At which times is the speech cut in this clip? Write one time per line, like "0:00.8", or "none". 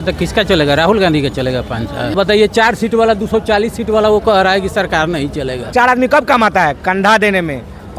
0:02.1
0:05.7